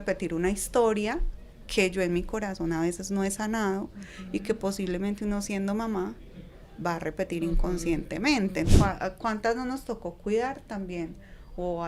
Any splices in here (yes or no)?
yes